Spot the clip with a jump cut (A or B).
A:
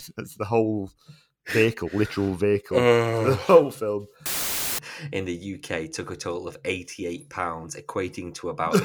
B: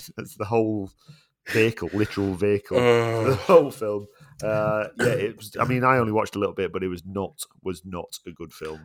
A